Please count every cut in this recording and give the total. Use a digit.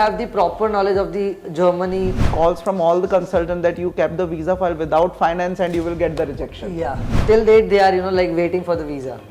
2